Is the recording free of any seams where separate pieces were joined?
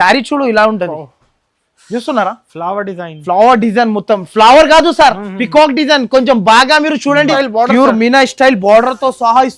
no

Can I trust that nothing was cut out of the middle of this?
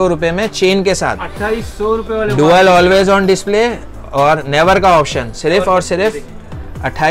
yes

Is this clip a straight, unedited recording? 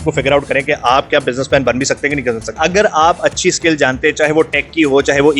no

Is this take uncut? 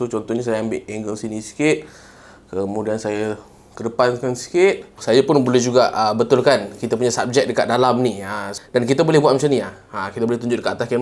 no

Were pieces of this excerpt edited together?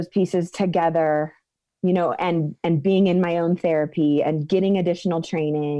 no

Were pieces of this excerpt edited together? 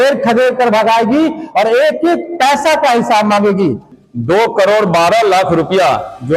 yes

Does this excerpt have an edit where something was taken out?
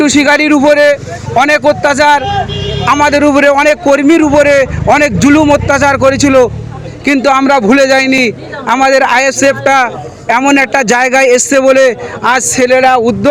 no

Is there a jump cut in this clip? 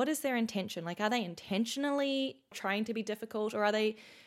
yes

